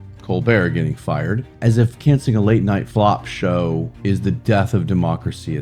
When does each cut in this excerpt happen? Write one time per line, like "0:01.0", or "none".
0:01.5
0:02.9
0:03.9

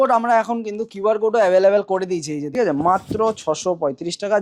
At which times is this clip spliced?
0:02.5

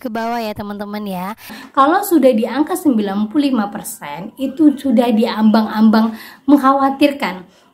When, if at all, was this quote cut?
0:01.6

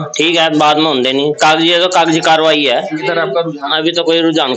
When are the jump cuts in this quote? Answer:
0:03.1

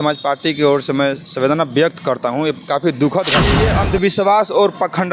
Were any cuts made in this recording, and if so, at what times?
0:03.6

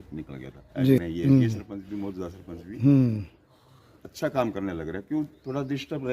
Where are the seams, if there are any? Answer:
0:01.0

